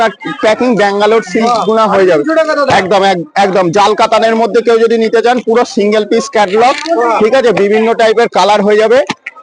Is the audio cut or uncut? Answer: uncut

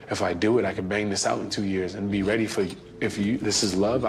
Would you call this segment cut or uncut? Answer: uncut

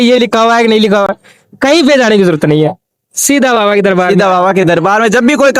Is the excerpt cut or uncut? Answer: uncut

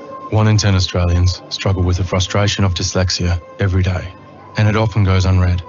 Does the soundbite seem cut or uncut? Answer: cut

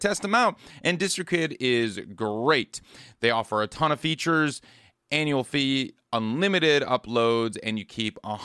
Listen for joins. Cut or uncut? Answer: uncut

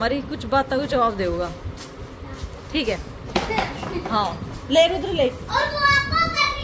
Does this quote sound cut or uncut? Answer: uncut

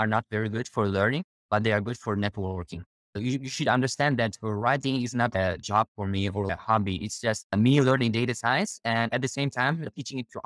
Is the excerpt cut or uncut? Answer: cut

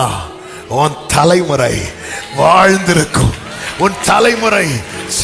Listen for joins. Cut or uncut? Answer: uncut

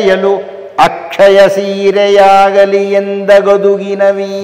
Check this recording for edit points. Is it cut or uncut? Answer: uncut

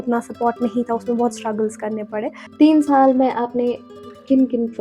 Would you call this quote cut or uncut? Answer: cut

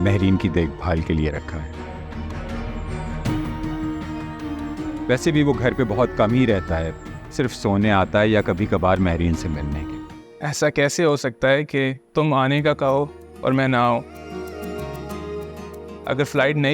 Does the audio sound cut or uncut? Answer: cut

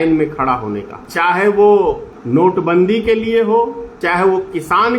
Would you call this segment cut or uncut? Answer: cut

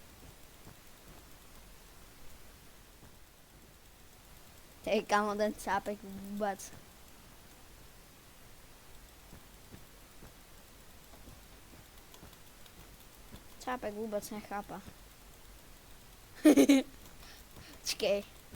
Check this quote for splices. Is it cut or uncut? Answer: cut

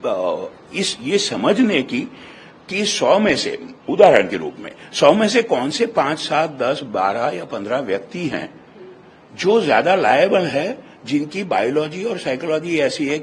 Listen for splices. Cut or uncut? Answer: uncut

